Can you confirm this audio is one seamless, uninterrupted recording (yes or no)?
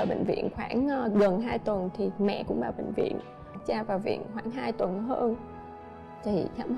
no